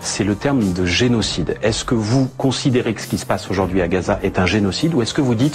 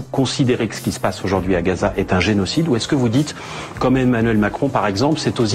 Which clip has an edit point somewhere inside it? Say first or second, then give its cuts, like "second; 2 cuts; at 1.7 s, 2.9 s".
first; 1 cut; at 1.1 s